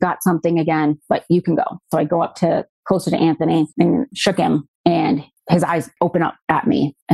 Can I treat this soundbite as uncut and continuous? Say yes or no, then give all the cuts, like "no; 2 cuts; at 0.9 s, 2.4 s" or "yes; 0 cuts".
no; 2 cuts; at 4.3 s, 5.9 s